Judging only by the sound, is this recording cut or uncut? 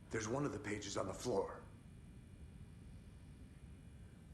cut